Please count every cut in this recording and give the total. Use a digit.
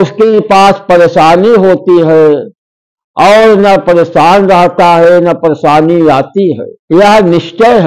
1